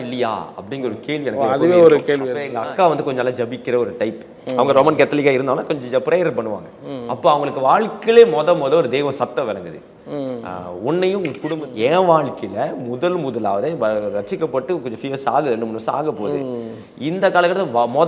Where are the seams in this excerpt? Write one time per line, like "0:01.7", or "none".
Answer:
0:02.4
0:11.7